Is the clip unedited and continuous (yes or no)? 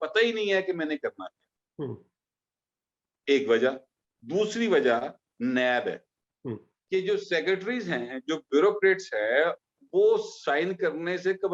yes